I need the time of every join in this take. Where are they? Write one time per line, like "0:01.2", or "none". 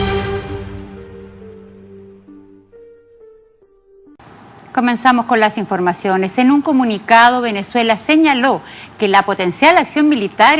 none